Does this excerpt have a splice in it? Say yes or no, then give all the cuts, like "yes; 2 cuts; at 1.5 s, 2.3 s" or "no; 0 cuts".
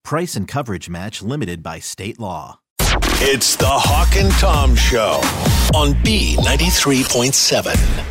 yes; 1 cut; at 2.6 s